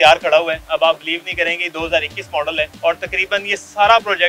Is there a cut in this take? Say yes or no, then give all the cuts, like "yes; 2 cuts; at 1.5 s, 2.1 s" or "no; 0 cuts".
yes; 1 cut; at 2.7 s